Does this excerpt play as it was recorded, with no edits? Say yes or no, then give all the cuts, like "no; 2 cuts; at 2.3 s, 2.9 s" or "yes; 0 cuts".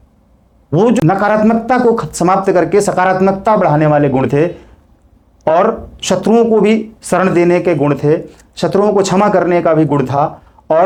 yes; 0 cuts